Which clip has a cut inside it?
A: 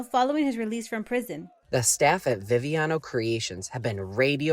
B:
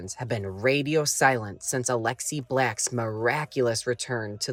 A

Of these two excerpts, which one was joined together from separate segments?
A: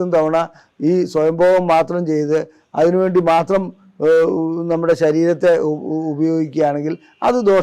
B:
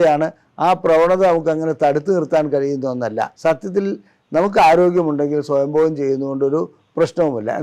B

